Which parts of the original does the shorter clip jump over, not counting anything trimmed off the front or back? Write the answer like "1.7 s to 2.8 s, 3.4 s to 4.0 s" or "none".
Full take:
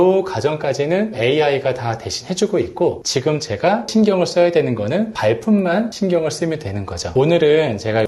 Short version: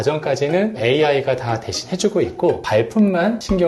3.0 s to 5.1 s